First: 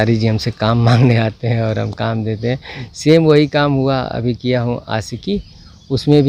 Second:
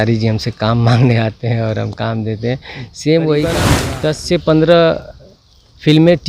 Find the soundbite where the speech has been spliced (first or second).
second